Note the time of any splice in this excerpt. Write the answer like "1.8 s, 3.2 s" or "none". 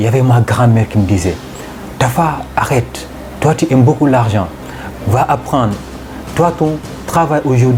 none